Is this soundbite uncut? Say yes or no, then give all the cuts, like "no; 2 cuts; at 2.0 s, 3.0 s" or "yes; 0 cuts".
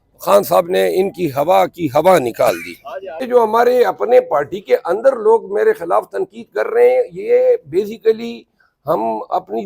no; 1 cut; at 3.3 s